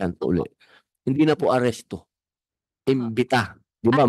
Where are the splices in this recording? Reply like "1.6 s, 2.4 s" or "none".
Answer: none